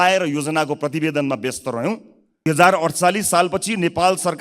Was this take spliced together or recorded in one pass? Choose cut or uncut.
cut